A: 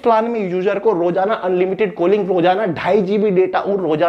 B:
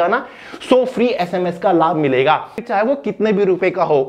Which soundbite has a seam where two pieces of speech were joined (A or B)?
B